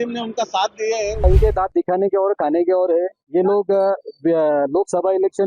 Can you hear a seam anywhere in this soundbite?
yes; 1 cut; at 1.2 s

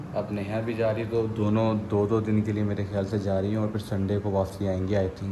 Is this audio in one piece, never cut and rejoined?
yes; 0 cuts

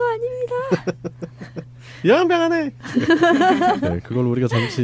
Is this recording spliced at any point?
no; 0 cuts

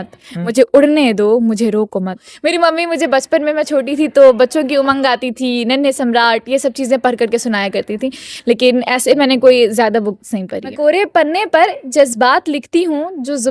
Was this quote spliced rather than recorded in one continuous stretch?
yes; 2 cuts; at 2.3 s, 10.7 s

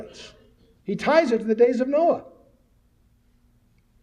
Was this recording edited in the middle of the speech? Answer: yes; 1 cut; at 1.4 s

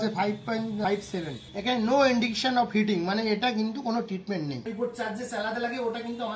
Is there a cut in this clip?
yes; 2 cuts; at 1.2 s, 4.7 s

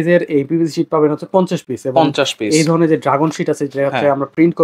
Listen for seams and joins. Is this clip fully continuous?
yes; 0 cuts

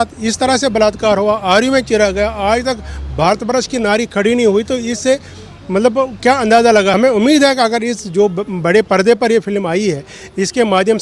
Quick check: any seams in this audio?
yes; 1 cut; at 7.0 s

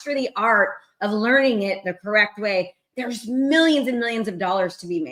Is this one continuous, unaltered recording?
yes; 0 cuts

